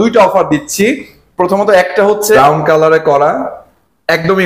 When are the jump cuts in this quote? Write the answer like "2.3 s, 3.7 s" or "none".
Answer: 2.4 s